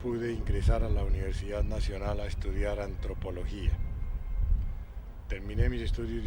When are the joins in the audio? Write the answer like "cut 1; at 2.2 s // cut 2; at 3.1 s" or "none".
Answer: cut 1; at 3.4 s